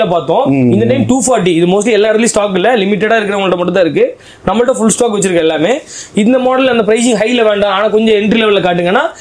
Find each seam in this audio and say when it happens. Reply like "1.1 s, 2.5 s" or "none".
none